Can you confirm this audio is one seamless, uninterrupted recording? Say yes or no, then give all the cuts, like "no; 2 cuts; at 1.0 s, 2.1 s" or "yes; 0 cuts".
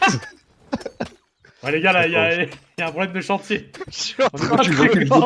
yes; 0 cuts